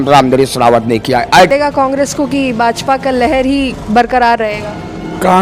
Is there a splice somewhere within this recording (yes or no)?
yes